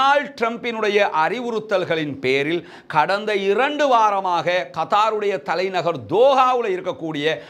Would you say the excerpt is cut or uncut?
uncut